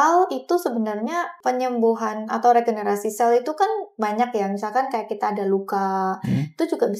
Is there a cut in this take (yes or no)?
yes